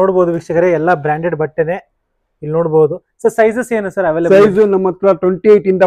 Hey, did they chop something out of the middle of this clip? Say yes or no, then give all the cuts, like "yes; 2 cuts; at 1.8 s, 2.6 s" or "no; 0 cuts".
no; 0 cuts